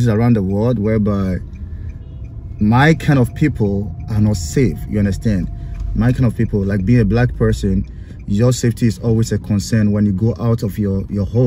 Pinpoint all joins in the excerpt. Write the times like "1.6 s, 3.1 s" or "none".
none

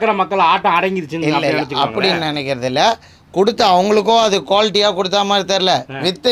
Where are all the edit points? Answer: none

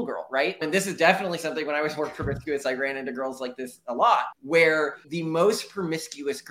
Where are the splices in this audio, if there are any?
5.1 s

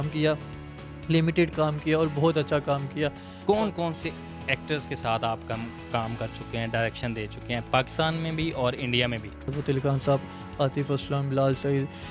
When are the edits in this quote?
3.2 s, 9.5 s

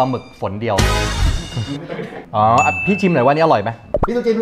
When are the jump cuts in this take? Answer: 2.1 s

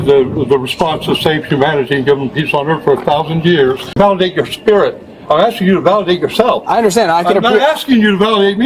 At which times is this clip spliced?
3.9 s

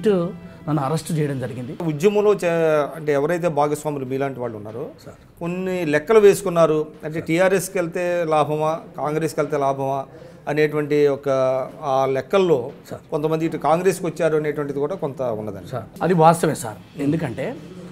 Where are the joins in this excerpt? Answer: 1.8 s, 15.9 s

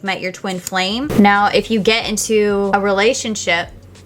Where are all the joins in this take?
2.7 s

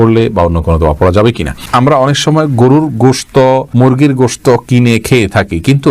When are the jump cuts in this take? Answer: 1.6 s

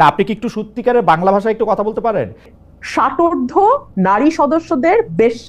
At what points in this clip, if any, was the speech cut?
2.5 s

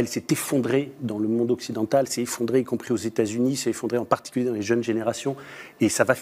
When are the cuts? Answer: none

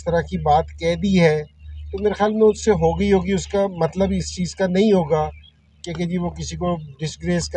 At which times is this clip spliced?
none

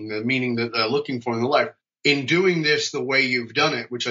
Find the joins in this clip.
1.8 s

